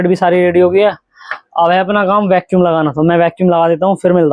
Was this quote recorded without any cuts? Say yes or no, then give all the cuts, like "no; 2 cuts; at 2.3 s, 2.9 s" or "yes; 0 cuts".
yes; 0 cuts